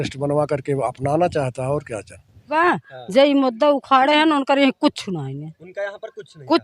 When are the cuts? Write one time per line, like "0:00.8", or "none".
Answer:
0:02.5